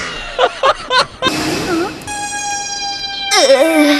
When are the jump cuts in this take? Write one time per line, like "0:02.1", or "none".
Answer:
0:01.3